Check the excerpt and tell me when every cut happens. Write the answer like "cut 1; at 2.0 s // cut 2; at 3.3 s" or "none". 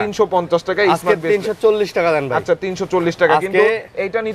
none